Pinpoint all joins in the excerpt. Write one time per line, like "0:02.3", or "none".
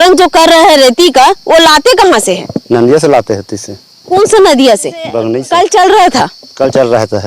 0:05.3